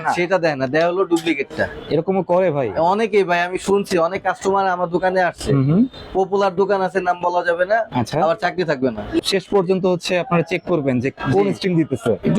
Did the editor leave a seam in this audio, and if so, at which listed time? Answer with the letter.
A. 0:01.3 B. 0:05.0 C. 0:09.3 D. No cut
C